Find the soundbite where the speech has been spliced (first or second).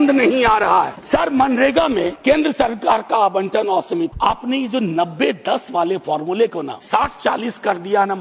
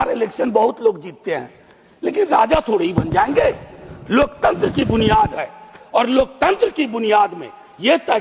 first